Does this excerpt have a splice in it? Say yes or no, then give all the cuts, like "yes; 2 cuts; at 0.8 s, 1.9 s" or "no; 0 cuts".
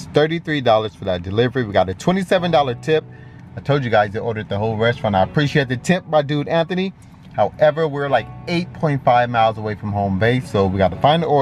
no; 0 cuts